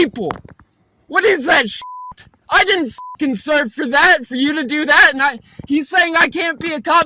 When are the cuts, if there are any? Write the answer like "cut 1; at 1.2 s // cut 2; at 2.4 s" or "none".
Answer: cut 1; at 1.8 s